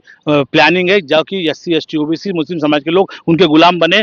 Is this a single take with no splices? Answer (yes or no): yes